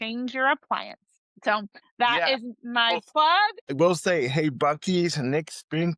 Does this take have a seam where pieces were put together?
yes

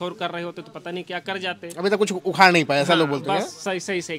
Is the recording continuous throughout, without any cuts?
yes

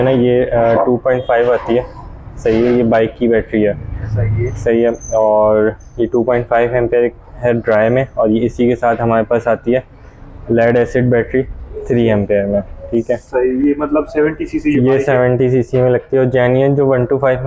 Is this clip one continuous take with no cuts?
yes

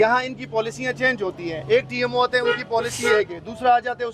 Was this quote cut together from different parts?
no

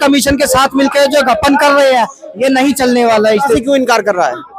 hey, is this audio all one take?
no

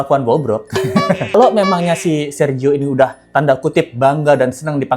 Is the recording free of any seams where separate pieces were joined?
no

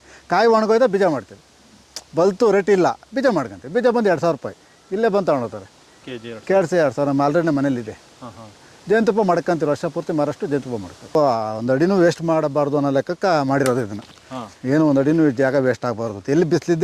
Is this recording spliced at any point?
yes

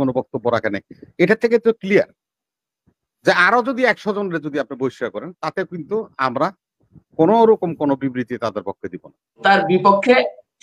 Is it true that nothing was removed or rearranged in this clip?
no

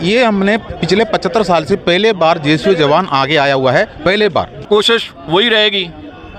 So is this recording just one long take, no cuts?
no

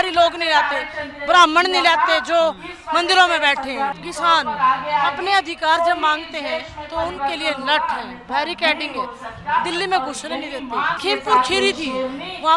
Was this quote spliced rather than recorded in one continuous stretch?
yes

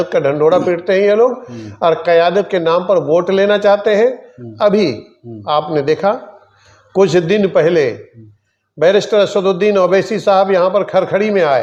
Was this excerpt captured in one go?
yes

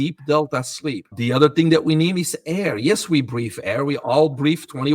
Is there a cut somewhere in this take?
yes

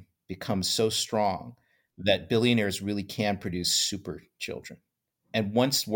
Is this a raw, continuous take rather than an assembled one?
yes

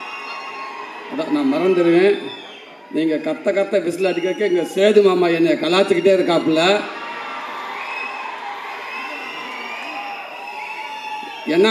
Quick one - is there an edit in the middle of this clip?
no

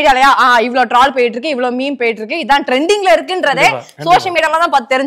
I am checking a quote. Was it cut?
no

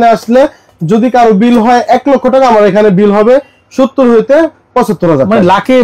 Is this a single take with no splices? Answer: yes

